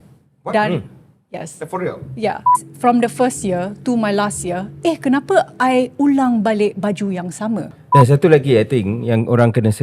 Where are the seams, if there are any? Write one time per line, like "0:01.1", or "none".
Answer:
0:02.6
0:07.8